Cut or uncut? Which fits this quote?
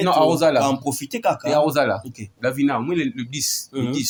uncut